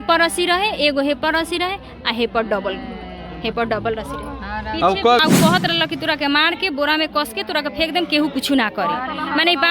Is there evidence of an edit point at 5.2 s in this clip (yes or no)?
yes